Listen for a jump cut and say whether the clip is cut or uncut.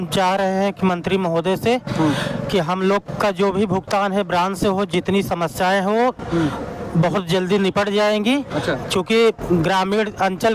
uncut